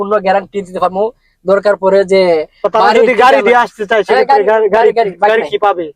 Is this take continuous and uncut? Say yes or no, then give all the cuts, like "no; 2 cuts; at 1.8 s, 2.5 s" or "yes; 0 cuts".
yes; 0 cuts